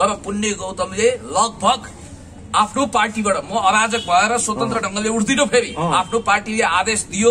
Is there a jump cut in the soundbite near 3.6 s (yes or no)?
no